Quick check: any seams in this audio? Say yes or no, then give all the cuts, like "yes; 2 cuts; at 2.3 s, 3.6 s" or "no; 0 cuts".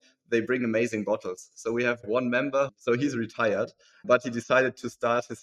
yes; 1 cut; at 2.0 s